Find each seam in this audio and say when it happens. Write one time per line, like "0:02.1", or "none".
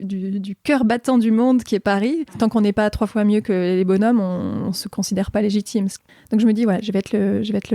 0:02.4
0:06.0